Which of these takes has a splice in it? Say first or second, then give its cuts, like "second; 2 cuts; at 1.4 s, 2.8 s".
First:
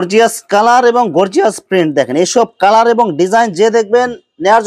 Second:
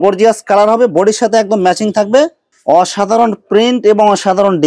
second; 1 cut; at 2.5 s